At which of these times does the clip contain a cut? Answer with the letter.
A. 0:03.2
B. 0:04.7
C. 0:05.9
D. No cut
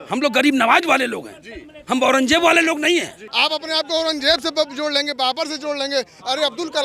A